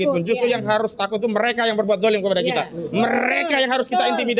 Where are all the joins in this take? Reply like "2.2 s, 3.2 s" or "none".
none